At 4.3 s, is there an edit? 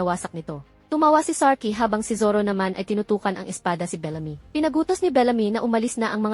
yes; 1 cut; at 4.3 s

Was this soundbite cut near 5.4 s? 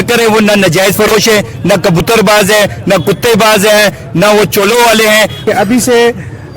yes; 1 cut; at 5.4 s

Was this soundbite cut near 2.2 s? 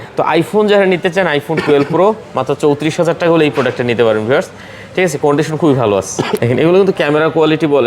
no; 1 cut; at 6.4 s

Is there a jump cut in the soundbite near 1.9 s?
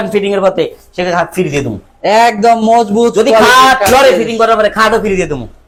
no; 0 cuts

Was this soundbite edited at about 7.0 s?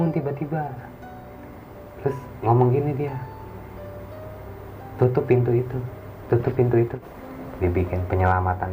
yes; 1 cut; at 7.0 s

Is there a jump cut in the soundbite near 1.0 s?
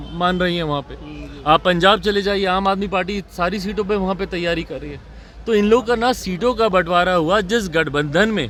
no; 0 cuts

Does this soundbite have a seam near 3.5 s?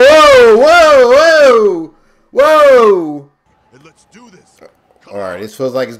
yes; 1 cut; at 3.5 s

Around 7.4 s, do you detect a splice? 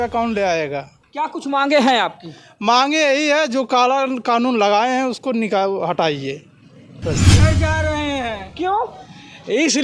yes; 1 cut; at 7.4 s

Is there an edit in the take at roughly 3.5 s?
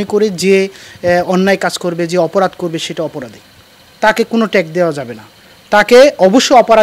no; 0 cuts

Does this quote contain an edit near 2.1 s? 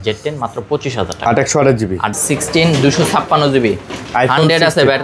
yes; 1 cut; at 2.1 s

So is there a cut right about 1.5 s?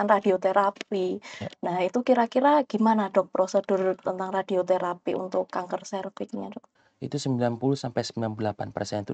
no; 1 cut; at 6.7 s

